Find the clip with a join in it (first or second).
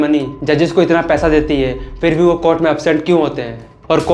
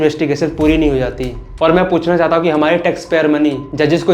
second